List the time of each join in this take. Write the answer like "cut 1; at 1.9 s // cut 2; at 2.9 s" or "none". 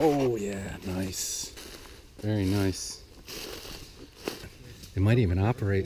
cut 1; at 4.5 s